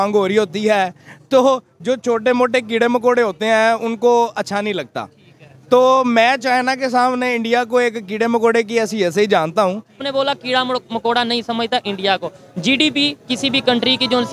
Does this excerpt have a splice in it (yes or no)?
yes